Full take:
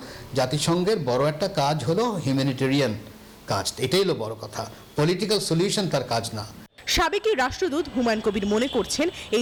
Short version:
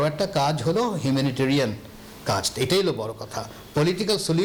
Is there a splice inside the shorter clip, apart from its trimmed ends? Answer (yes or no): no